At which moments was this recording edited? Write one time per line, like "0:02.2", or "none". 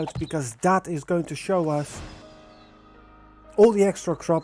0:02.2